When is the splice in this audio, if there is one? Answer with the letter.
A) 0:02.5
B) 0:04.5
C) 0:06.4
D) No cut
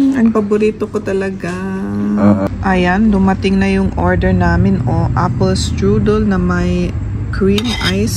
A